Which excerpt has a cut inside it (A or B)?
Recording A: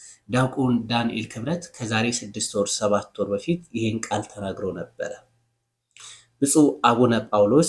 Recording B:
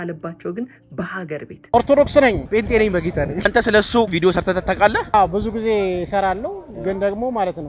B